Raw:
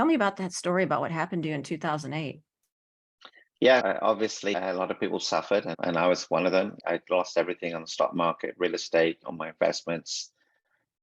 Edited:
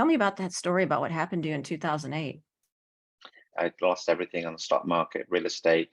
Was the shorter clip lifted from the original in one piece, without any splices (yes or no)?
no